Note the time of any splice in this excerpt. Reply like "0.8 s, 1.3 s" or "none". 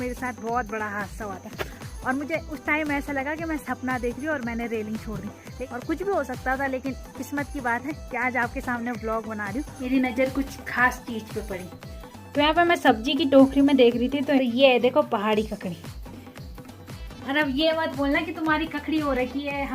1.8 s, 5.5 s, 9.8 s, 14.4 s